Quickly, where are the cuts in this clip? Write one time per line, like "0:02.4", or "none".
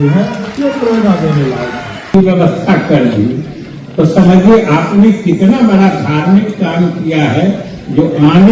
0:02.1

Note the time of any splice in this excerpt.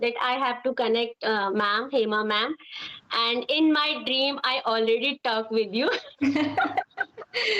none

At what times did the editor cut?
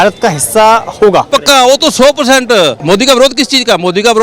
0:01.3
0:02.8

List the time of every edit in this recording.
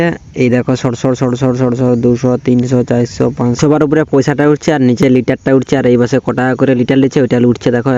none

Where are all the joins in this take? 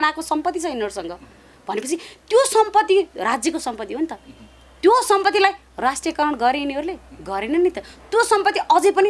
none

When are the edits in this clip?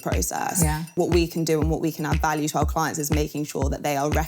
0:00.9

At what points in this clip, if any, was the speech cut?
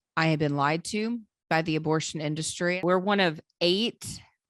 0:02.8

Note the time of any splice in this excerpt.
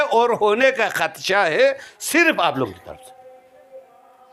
none

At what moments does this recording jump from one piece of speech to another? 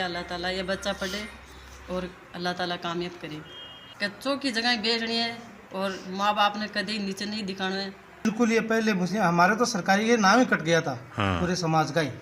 0:04.2
0:08.2

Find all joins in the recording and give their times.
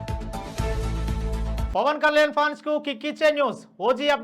0:01.7

